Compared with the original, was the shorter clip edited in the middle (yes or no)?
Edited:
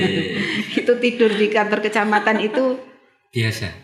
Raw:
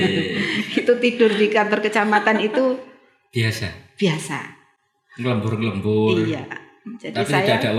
no